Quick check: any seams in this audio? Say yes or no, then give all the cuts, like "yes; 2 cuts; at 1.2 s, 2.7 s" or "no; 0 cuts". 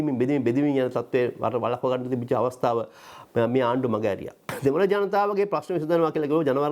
yes; 1 cut; at 4.5 s